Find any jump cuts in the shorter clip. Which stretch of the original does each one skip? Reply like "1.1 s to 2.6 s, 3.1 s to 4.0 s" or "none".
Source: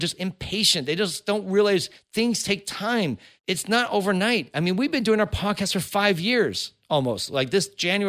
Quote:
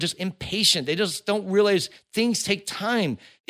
none